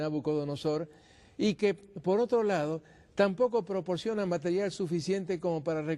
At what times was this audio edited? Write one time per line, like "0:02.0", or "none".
none